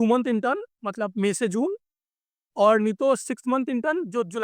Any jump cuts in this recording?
no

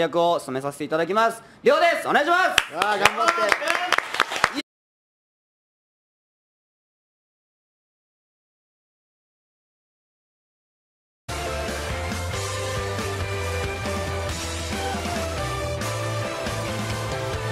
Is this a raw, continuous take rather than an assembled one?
yes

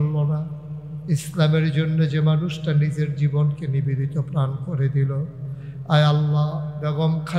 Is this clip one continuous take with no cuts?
yes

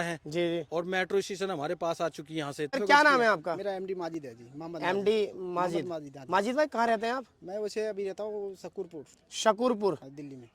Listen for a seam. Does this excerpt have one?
yes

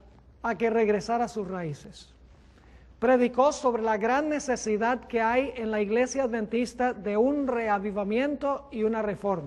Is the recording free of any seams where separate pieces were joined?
no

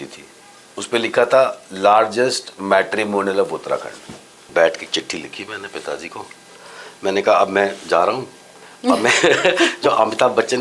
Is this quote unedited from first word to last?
no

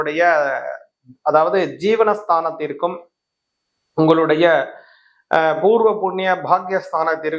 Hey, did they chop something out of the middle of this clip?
no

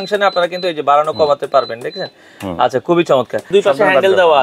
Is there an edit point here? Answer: yes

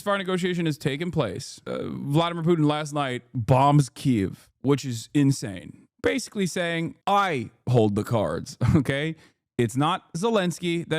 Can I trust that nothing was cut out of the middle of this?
no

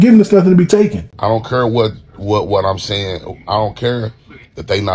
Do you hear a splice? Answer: yes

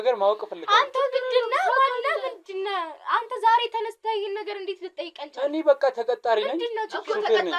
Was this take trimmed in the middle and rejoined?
no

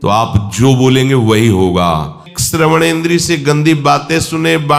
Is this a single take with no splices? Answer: no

